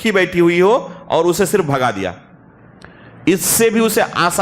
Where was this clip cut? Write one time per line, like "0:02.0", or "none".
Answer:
none